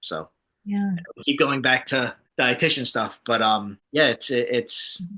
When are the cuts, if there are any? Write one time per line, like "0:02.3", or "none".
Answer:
0:02.2
0:03.8